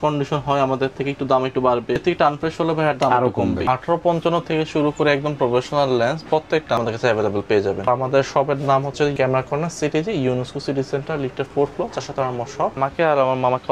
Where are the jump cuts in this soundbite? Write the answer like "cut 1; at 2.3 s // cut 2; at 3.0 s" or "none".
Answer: cut 1; at 2.0 s // cut 2; at 3.6 s // cut 3; at 6.8 s // cut 4; at 7.9 s // cut 5; at 9.1 s // cut 6; at 12.8 s